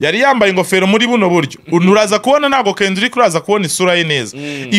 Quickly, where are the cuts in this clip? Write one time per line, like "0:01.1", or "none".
none